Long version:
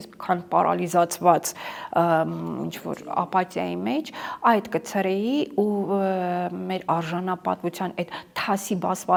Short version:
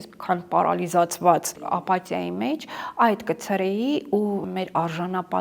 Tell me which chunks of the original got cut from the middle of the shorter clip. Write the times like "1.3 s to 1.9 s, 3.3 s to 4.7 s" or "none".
1.5 s to 3.0 s, 5.9 s to 6.6 s